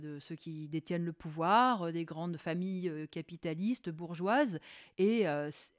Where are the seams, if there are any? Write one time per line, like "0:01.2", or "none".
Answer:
none